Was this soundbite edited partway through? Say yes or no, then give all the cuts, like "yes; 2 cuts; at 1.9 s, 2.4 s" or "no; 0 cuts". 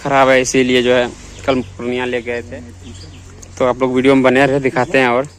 yes; 1 cut; at 2.5 s